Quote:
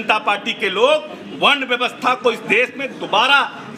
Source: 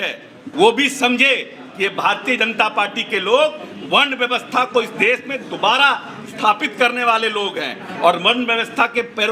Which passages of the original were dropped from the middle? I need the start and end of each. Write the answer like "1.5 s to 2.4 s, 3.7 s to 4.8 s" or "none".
none